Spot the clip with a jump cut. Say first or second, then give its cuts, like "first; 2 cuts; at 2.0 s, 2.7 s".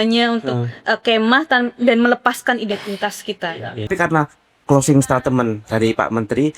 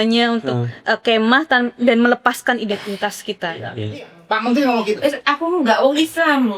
first; 1 cut; at 3.9 s